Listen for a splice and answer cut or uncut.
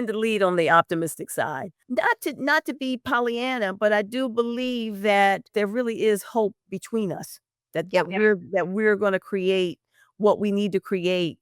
cut